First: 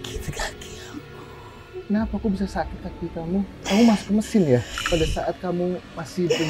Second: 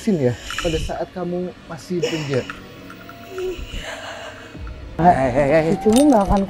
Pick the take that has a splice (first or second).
second